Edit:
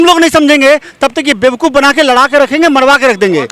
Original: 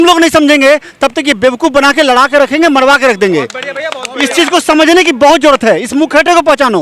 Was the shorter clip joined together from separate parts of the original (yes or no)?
no